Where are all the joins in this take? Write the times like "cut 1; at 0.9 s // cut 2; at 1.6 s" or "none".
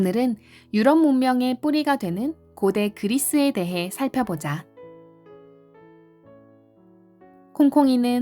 cut 1; at 5.3 s // cut 2; at 7.5 s

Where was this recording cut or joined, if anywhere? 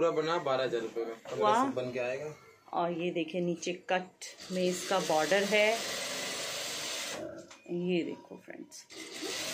cut 1; at 1.4 s

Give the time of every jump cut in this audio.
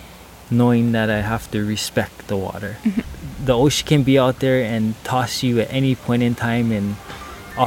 cut 1; at 3.2 s

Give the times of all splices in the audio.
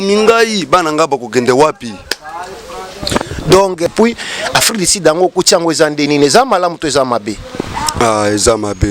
cut 1; at 3.9 s

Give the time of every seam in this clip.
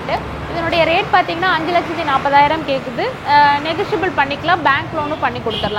none

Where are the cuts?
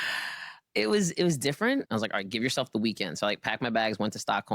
cut 1; at 1.9 s

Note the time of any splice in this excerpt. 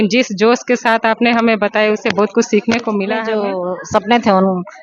cut 1; at 3.3 s

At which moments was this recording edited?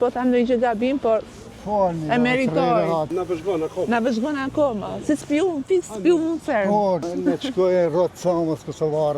cut 1; at 3.1 s // cut 2; at 7.0 s

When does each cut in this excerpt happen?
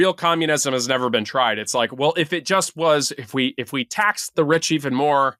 none

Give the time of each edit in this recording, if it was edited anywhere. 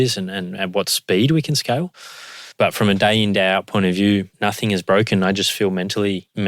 none

